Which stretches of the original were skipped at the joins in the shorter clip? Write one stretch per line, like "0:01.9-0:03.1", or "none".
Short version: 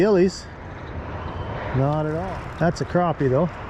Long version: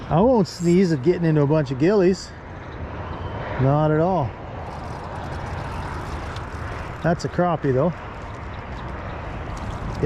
0:04.1-0:06.7